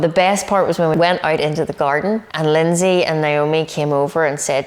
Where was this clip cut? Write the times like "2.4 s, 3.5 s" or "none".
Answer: 0.9 s, 2.3 s